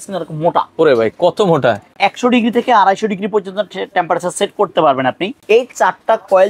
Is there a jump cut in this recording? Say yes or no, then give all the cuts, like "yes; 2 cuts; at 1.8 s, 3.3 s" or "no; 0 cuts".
yes; 2 cuts; at 1.9 s, 5.4 s